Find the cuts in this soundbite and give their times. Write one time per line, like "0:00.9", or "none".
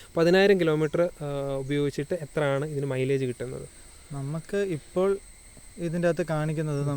none